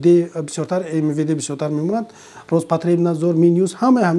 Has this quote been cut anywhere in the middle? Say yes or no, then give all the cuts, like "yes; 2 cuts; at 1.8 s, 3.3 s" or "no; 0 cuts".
no; 0 cuts